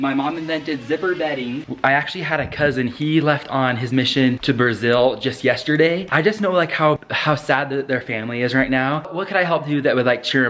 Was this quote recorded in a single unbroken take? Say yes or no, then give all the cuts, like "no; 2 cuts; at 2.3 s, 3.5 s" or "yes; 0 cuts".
no; 3 cuts; at 1.6 s, 6.0 s, 9.1 s